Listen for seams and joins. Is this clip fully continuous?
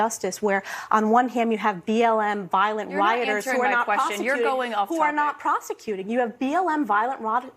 no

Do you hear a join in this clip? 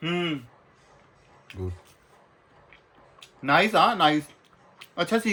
no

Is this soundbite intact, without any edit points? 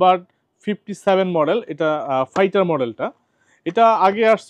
yes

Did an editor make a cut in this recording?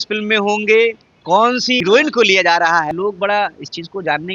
yes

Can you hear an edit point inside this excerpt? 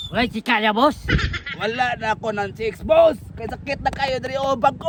no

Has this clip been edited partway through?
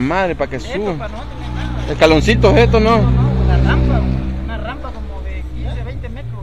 no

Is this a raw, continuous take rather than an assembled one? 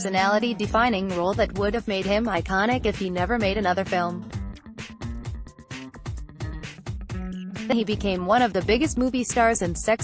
no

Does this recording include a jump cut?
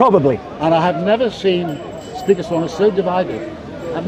no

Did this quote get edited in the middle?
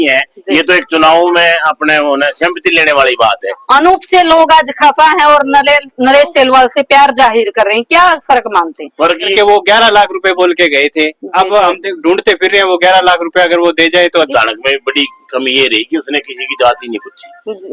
yes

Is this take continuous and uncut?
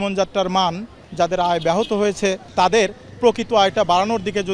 no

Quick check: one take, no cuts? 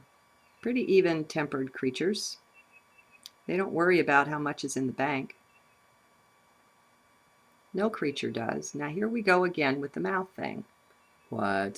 no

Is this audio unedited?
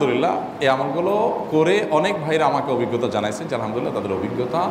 yes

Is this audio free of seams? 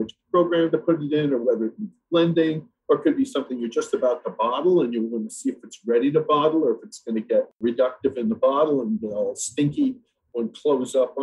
no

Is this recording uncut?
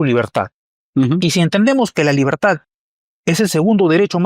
yes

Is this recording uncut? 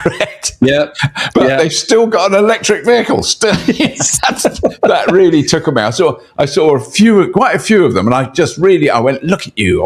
yes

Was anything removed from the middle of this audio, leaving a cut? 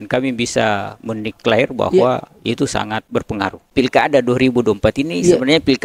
yes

